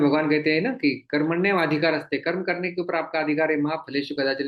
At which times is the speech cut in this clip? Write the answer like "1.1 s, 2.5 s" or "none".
none